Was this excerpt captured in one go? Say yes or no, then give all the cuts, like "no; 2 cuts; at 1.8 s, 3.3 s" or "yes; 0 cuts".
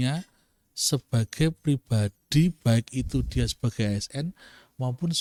yes; 0 cuts